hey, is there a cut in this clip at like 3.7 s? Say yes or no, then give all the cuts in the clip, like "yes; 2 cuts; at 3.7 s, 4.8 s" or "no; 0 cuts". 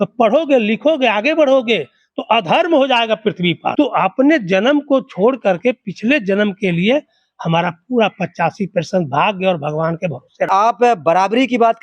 yes; 2 cuts; at 3.7 s, 10.5 s